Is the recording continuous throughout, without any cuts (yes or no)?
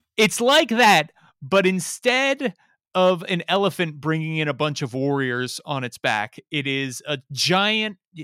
yes